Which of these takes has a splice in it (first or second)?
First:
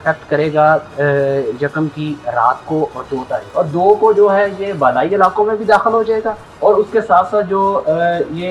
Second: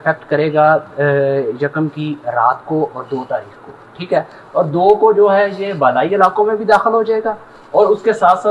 first